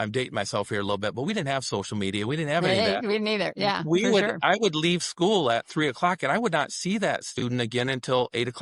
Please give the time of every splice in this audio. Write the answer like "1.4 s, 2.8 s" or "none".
none